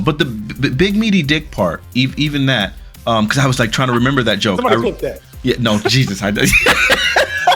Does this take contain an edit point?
no; 0 cuts

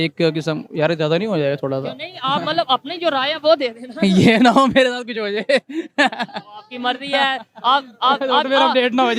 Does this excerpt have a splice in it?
no; 0 cuts

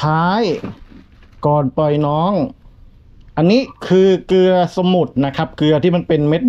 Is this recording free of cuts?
yes; 0 cuts

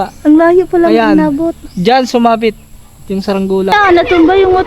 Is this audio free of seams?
no; 1 cut; at 3.7 s

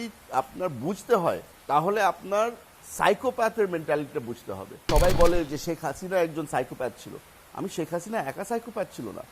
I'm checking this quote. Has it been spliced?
yes; 1 cut; at 4.8 s

